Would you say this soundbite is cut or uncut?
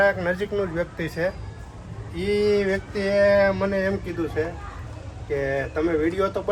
uncut